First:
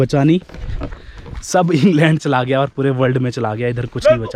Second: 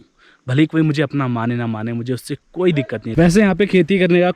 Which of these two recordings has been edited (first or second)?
second